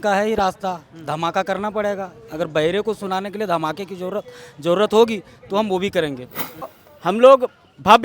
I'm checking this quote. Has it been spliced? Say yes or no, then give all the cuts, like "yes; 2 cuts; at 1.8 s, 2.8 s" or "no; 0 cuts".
yes; 1 cut; at 6.7 s